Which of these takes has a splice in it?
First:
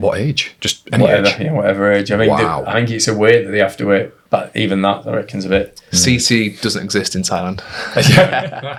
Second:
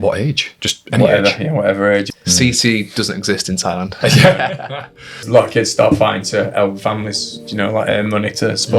second; 3 cuts; at 2.1 s, 3.9 s, 5.2 s

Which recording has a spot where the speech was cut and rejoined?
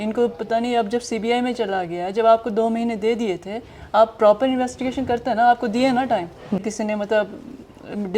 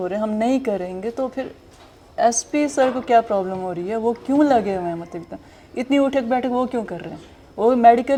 first; 1 cut; at 6.6 s

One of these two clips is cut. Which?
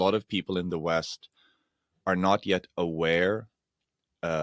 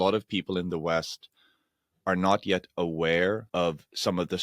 second; 1 cut; at 3.5 s

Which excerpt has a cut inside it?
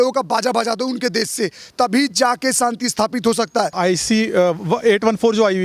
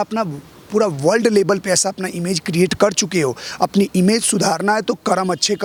first; 1 cut; at 3.8 s

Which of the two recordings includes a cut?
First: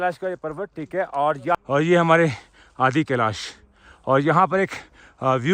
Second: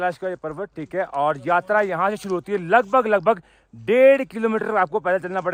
first; 1 cut; at 1.5 s

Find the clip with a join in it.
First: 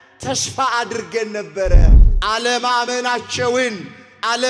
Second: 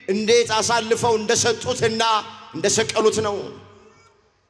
first; 1 cut; at 1.9 s

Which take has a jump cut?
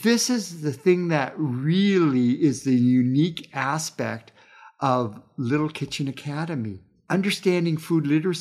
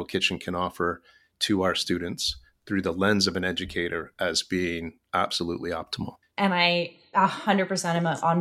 second; 1 cut; at 6.3 s

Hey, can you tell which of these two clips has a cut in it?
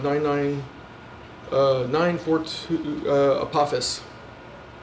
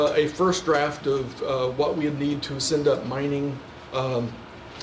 first; 1 cut; at 2.6 s

